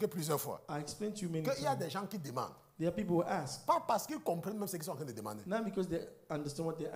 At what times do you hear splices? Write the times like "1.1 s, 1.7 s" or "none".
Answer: none

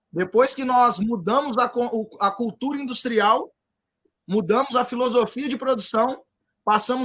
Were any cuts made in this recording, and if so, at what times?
none

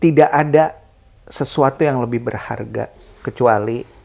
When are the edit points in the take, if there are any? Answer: 3.0 s

